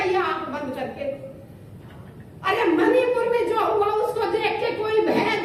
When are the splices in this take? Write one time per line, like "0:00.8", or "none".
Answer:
none